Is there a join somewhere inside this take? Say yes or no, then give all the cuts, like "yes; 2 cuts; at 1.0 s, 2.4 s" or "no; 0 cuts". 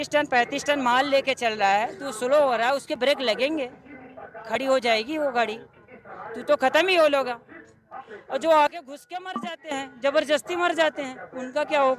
no; 0 cuts